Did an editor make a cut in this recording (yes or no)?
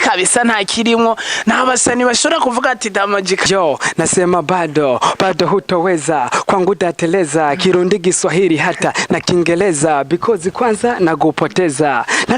yes